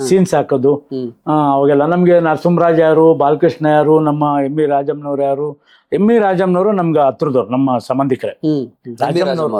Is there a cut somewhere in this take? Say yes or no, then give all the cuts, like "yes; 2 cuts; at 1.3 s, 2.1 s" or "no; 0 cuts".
no; 0 cuts